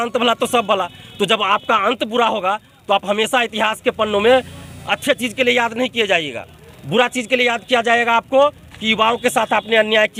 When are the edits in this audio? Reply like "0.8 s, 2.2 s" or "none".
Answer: none